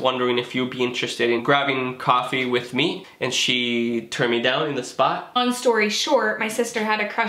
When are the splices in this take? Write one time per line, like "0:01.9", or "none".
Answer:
0:01.4
0:03.0
0:05.4